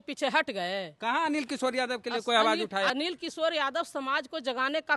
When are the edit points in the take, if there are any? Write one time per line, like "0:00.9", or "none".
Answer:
0:02.9